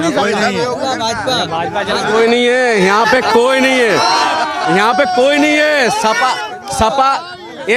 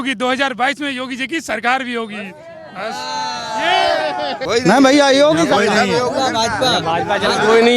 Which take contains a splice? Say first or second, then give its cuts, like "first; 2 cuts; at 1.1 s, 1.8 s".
second; 1 cut; at 4.4 s